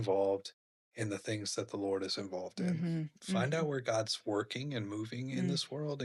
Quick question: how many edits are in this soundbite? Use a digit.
1